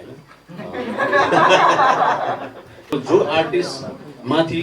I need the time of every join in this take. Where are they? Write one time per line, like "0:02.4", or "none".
0:02.9